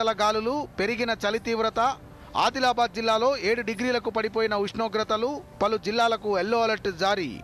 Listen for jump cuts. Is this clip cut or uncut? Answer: uncut